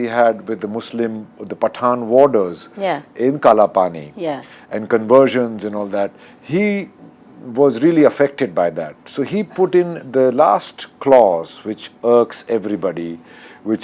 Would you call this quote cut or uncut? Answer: uncut